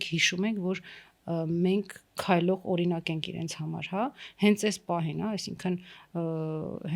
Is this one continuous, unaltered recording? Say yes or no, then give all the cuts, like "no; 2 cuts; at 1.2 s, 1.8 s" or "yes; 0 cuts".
yes; 0 cuts